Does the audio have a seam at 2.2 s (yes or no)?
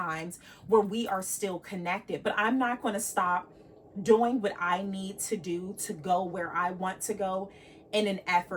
yes